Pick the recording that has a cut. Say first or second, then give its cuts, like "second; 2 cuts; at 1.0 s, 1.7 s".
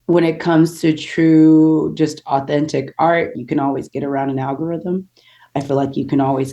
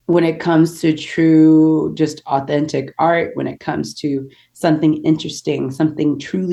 first; 1 cut; at 3.3 s